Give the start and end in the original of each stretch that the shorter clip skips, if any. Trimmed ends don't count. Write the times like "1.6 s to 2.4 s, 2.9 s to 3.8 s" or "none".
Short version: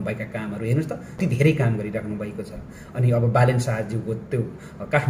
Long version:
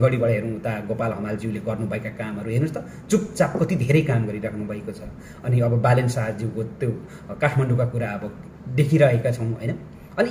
3.0 s to 3.7 s